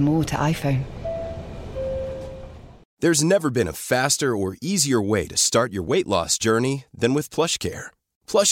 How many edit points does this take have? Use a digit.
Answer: 1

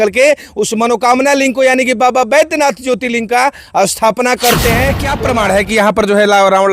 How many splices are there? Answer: 1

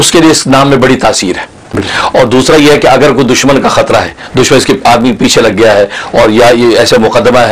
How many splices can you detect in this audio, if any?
1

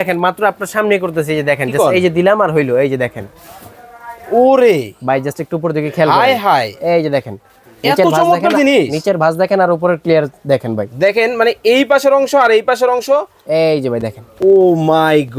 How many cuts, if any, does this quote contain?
0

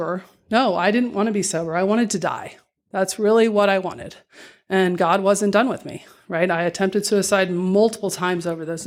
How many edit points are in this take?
0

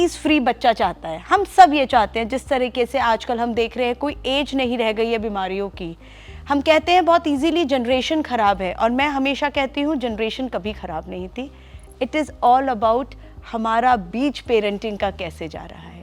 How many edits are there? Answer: 0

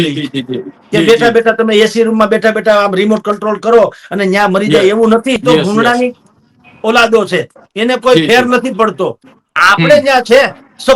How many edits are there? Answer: 1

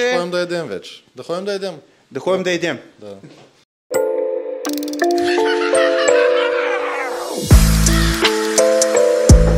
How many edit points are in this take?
1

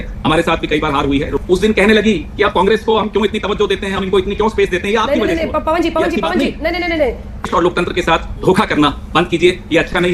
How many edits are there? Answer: 2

